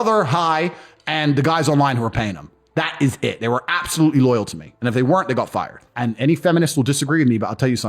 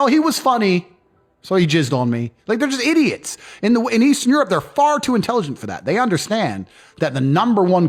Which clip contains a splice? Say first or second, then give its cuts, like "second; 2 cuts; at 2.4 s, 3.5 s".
first; 1 cut; at 5.8 s